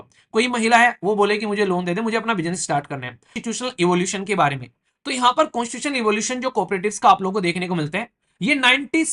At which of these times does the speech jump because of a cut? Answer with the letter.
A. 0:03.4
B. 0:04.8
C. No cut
A